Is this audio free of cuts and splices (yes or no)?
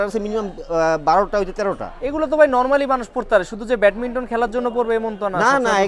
yes